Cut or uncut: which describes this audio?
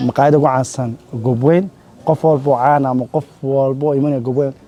uncut